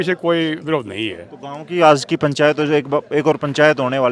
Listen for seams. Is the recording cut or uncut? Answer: uncut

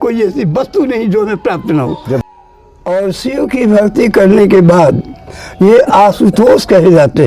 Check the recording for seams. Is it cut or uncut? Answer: cut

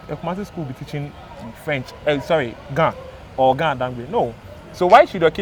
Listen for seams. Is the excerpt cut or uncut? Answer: uncut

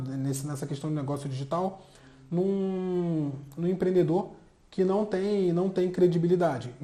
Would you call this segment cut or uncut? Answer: uncut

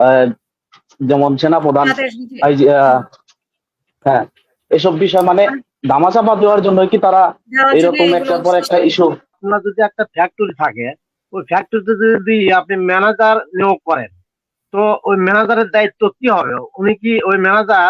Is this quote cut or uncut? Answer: cut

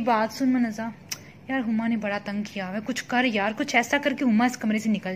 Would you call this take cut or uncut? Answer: uncut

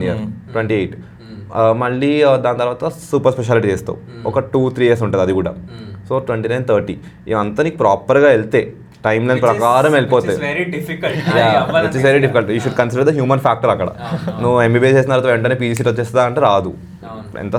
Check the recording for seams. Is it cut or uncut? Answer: uncut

